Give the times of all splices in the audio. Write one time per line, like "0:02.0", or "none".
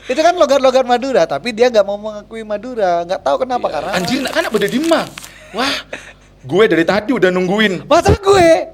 0:03.9